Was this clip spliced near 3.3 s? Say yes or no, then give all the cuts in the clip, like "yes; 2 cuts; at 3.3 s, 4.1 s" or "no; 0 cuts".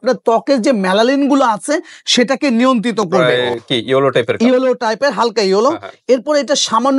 yes; 1 cut; at 3.3 s